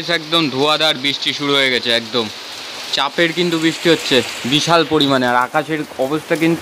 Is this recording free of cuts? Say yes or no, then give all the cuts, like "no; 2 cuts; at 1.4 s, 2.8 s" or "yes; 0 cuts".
yes; 0 cuts